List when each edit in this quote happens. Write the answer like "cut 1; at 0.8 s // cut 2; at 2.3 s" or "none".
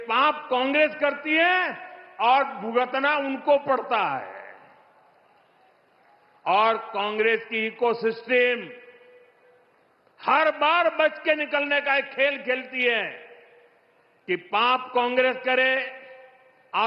none